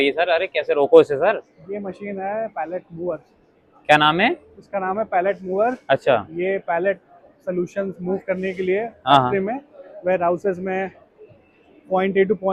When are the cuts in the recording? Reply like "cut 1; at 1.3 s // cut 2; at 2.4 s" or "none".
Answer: none